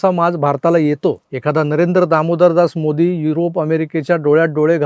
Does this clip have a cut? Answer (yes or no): yes